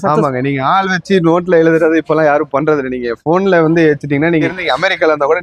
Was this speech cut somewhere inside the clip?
yes; 1 cut; at 4.5 s

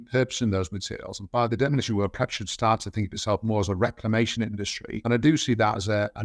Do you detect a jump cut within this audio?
yes; 2 cuts; at 1.5 s, 4.8 s

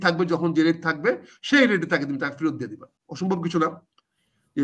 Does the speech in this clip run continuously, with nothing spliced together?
no; 1 cut; at 3.0 s

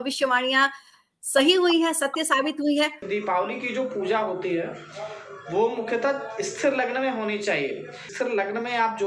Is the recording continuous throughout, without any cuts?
no; 2 cuts; at 3.0 s, 8.1 s

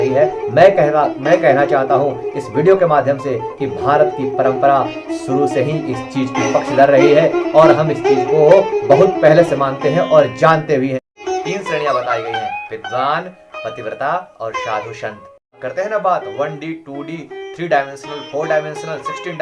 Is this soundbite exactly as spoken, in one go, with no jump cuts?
no; 2 cuts; at 11.2 s, 15.6 s

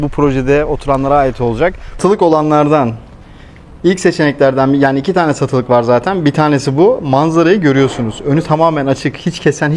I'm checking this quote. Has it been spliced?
yes; 1 cut; at 1.9 s

